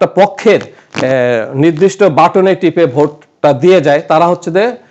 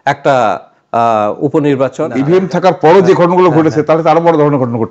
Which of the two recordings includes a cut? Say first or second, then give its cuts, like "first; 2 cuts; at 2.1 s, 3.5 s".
second; 1 cut; at 2.1 s